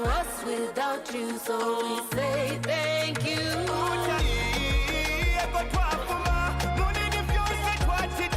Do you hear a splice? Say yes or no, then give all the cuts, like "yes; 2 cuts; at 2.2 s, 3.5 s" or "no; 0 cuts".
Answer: no; 0 cuts